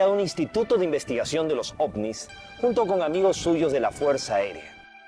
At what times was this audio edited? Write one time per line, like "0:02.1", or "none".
none